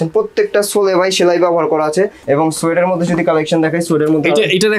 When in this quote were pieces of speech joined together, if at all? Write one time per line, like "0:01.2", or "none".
0:02.2